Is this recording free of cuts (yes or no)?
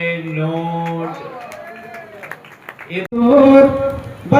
no